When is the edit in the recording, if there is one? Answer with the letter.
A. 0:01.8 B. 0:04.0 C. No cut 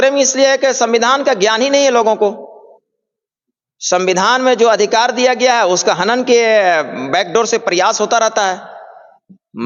C